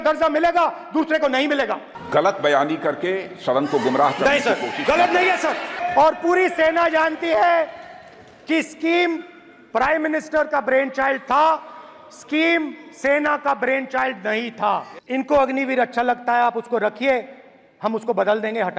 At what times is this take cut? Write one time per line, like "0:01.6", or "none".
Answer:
0:01.9
0:05.7
0:14.9

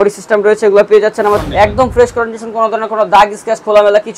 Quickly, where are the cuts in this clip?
0:01.5

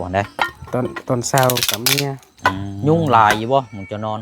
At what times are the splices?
0:02.3

